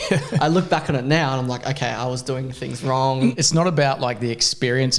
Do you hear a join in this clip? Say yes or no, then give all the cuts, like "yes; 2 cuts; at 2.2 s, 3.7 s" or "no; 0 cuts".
yes; 1 cut; at 3.3 s